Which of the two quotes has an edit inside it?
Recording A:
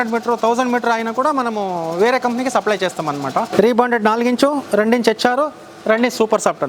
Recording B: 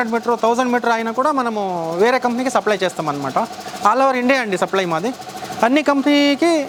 A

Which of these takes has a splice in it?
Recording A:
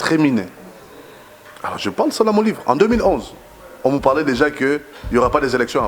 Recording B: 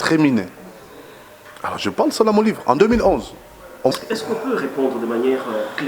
B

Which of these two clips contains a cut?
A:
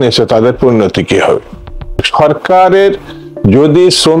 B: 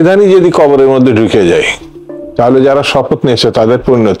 A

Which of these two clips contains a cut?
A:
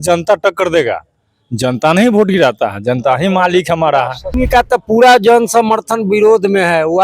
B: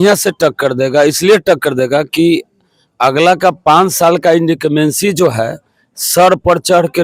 A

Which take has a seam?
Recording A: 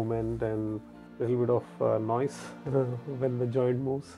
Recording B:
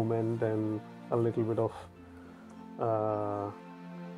A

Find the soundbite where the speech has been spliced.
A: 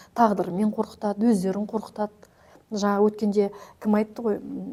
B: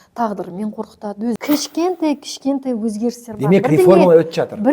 B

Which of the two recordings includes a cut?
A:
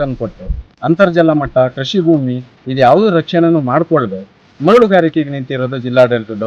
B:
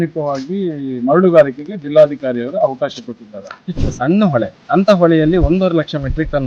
B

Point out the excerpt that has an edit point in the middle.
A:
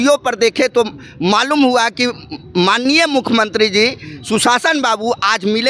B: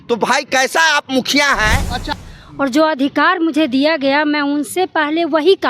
B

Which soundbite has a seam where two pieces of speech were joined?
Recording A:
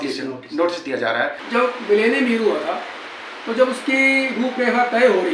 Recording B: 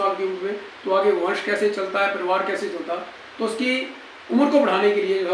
A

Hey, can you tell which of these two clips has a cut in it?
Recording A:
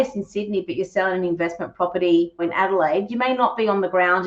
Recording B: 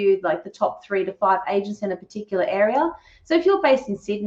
A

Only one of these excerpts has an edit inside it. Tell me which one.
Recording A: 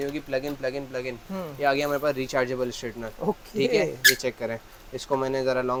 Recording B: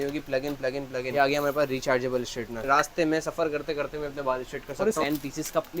B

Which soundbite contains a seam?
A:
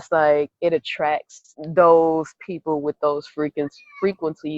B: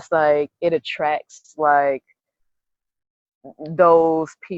A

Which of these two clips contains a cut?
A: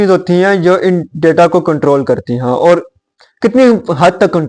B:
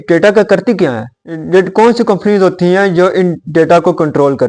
B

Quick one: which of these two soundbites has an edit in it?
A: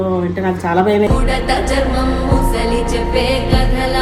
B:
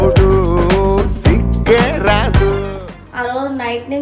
B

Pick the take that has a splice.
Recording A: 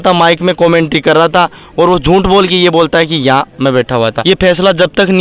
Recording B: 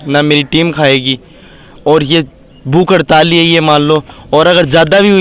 A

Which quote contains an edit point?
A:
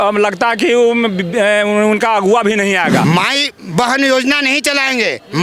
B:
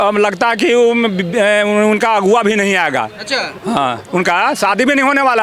A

